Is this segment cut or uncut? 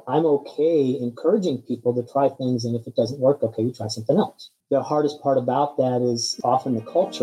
cut